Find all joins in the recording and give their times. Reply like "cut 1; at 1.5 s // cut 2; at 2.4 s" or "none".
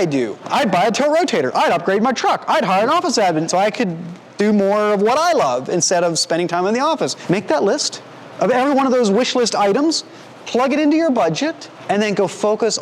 cut 1; at 3.5 s // cut 2; at 7.2 s // cut 3; at 11.7 s

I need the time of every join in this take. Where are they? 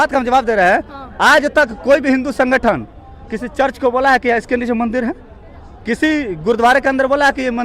none

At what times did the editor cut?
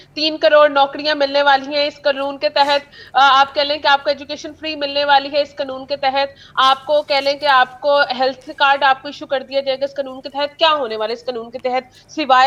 none

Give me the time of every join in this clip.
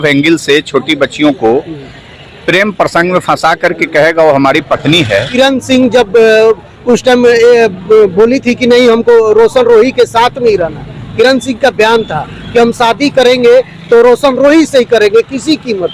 cut 1; at 5.3 s

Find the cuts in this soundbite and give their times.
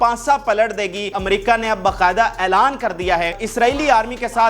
cut 1; at 1.1 s // cut 2; at 3.4 s

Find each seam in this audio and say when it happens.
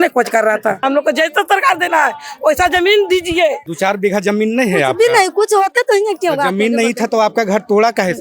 cut 1; at 0.8 s // cut 2; at 3.7 s

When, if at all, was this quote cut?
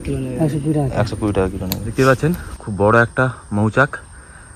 cut 1; at 1.8 s

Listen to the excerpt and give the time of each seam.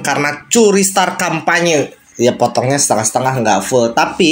cut 1; at 2.0 s

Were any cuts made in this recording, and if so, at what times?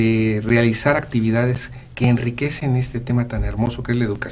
none

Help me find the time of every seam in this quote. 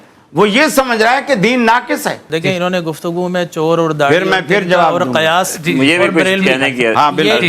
cut 1; at 2.3 s

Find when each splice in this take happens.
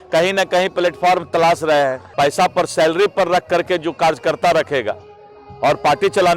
cut 1; at 2.0 s

